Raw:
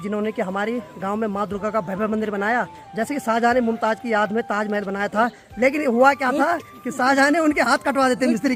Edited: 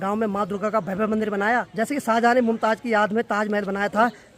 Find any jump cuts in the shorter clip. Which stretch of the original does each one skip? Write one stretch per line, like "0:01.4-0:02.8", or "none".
0:02.7-0:02.9